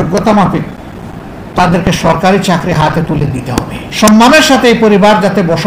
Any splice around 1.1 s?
no; 1 cut; at 3.8 s

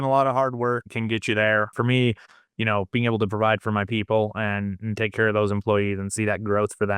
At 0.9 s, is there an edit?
yes; 2 cuts; at 0.9 s, 1.7 s

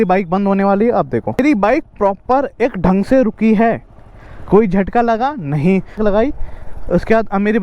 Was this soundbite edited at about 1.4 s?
yes; 2 cuts; at 1.4 s, 6.0 s

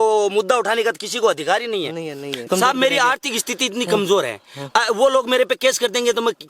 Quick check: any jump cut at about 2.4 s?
yes; 1 cut; at 2.4 s

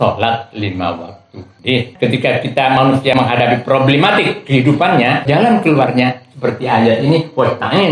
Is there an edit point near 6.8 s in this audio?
no; 3 cuts; at 1.9 s, 3.1 s, 5.3 s

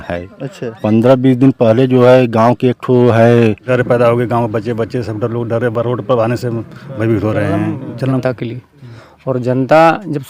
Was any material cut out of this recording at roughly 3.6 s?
yes; 2 cuts; at 3.6 s, 8.1 s

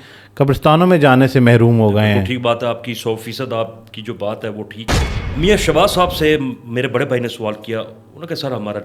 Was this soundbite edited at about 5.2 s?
yes; 1 cut; at 5.2 s

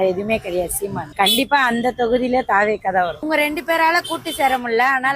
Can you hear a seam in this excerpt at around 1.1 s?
yes; 2 cuts; at 1.1 s, 3.2 s

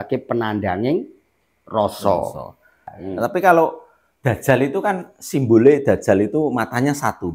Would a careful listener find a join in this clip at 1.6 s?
no; 1 cut; at 2.9 s

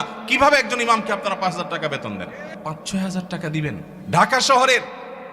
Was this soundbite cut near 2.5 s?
yes; 2 cuts; at 2.5 s, 3.9 s

